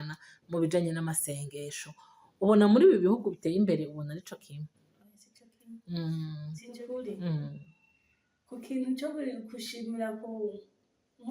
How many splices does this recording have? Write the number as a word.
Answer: one